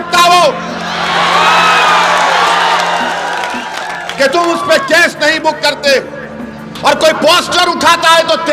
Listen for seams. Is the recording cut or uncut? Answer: uncut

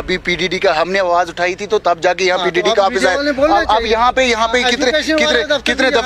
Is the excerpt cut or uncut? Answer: uncut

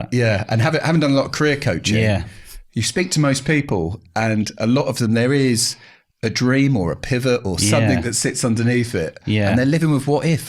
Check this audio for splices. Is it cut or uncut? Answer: uncut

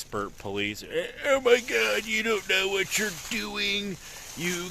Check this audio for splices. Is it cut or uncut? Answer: uncut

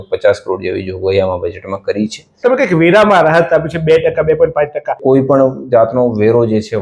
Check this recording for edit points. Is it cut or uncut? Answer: cut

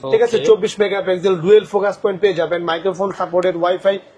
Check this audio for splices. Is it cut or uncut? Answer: uncut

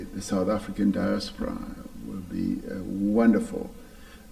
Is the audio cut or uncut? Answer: uncut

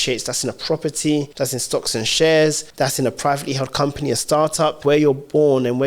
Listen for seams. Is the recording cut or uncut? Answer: cut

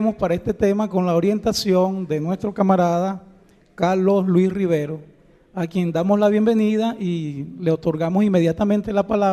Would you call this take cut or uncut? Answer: cut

